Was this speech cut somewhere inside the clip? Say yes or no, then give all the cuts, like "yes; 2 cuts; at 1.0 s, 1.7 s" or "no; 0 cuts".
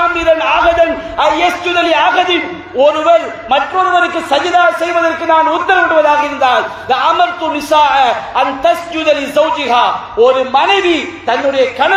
no; 0 cuts